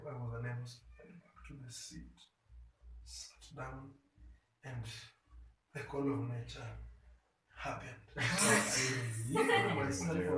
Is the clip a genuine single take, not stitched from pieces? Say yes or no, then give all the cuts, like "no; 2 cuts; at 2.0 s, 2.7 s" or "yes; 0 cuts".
yes; 0 cuts